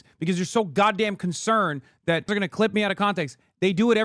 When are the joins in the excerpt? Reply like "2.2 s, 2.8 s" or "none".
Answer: 2.3 s